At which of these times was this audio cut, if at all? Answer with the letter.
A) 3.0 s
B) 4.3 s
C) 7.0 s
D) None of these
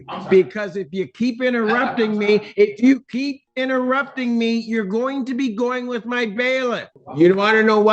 C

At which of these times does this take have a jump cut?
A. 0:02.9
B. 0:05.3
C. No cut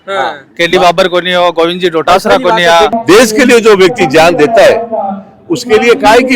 A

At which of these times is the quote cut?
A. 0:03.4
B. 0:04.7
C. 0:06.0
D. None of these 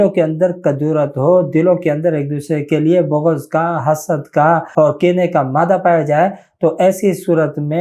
B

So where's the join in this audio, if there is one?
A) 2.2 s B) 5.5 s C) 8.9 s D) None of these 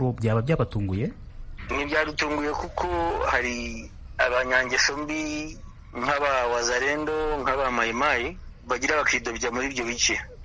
D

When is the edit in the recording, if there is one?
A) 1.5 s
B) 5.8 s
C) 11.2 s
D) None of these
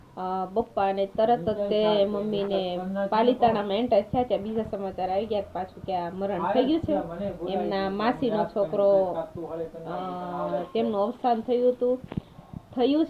D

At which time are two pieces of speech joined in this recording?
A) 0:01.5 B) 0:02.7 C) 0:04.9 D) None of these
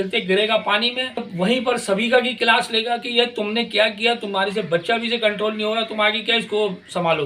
A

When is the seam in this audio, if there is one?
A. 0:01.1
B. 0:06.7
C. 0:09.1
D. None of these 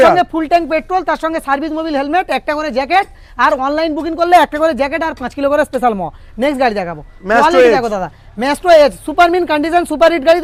D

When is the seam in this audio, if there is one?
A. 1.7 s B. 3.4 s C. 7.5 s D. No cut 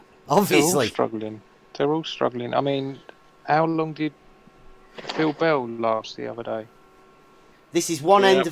C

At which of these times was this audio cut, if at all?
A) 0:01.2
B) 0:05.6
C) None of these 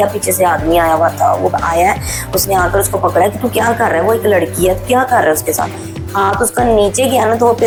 C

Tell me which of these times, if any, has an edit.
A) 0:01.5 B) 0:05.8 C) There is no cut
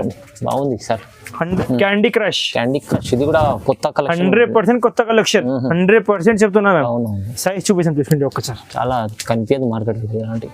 A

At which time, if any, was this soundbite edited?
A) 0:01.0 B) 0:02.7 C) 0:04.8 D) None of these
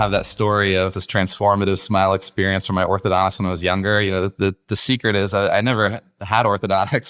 A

